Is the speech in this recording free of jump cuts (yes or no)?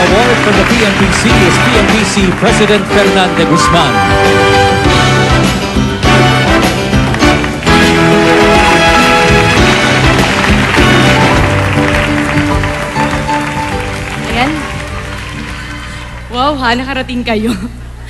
no